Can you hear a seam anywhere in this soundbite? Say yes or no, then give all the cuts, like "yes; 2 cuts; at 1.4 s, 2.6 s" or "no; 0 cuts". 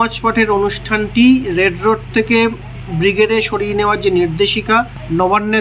no; 0 cuts